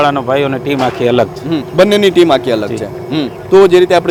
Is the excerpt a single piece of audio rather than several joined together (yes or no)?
yes